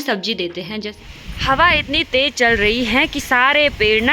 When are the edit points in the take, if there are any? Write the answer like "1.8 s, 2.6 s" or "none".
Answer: 1.0 s

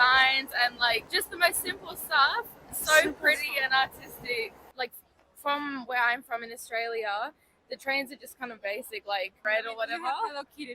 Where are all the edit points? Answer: 1.1 s, 4.6 s, 9.4 s

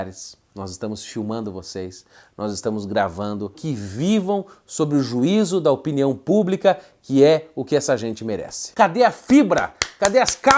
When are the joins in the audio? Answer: 3.6 s, 8.7 s

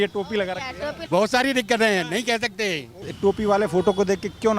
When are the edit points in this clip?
0.9 s, 3.0 s

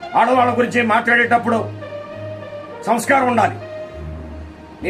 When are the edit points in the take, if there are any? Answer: none

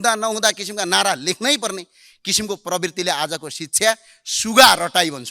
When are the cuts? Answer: none

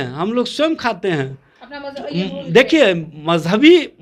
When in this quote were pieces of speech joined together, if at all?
none

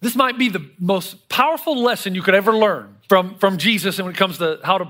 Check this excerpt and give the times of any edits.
2.9 s

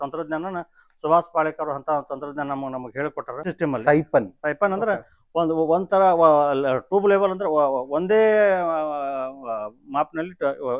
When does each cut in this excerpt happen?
3.5 s

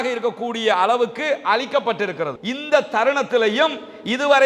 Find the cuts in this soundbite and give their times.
2.4 s

